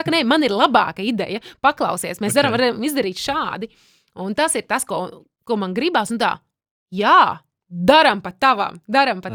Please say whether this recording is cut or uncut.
uncut